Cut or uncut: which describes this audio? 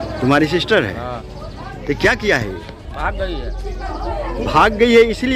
uncut